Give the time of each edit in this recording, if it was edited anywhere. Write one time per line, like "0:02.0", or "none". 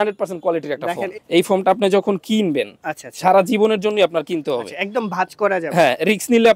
0:01.1